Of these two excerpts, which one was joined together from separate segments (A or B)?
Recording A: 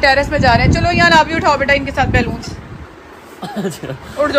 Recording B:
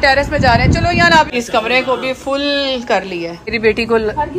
B